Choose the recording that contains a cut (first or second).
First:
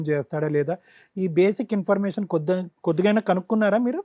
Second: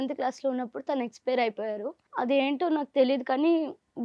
second